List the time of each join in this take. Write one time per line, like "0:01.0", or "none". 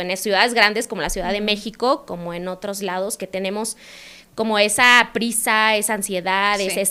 none

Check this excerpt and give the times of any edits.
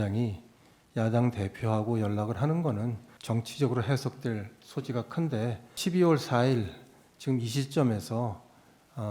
0:03.1
0:05.7

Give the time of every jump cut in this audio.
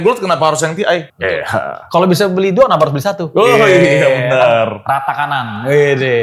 none

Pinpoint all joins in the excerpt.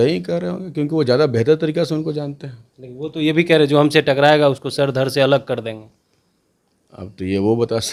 none

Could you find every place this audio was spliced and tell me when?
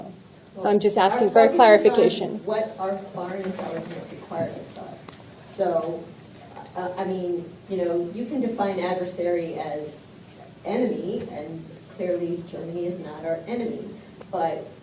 0:13.1

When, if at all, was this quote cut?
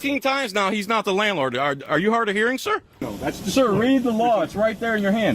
0:03.1

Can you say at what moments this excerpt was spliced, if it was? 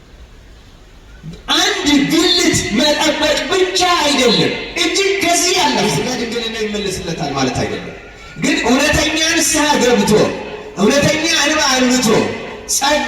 0:05.8

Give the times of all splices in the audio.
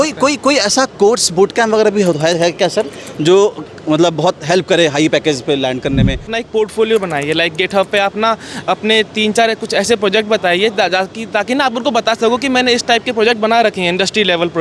0:06.3

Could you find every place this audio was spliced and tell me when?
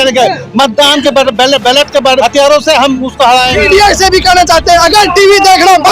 0:02.2
0:03.5

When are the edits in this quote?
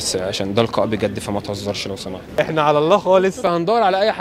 0:02.5
0:03.5

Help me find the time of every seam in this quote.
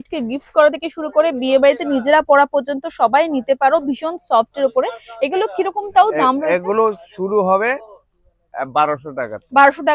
none

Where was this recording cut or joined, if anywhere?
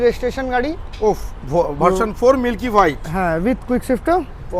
none

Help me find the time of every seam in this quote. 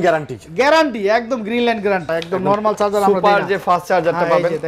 0:02.1

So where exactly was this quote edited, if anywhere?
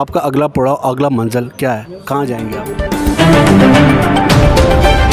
0:02.9

